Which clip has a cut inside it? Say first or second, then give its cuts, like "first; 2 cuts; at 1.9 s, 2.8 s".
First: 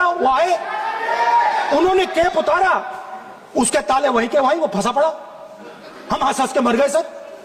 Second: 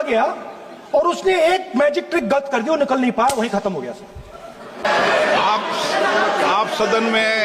second; 1 cut; at 4.9 s